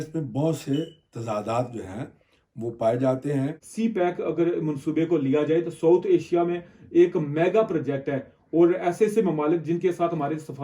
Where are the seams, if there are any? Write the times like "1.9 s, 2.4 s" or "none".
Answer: 3.7 s